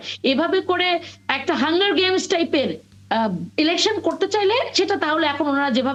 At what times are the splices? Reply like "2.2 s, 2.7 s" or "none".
none